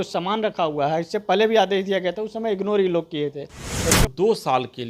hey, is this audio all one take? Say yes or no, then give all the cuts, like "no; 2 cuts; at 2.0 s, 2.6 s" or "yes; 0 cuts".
no; 1 cut; at 4.0 s